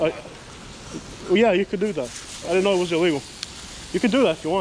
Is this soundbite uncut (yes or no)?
yes